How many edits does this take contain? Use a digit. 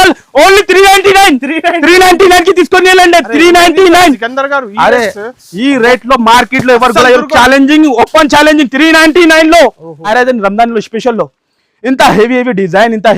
1